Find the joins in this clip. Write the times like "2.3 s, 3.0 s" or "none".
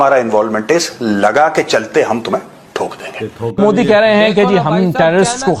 none